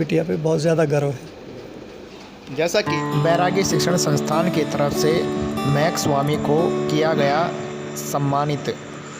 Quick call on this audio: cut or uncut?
uncut